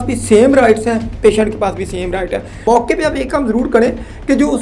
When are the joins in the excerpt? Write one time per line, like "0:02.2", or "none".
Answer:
0:02.6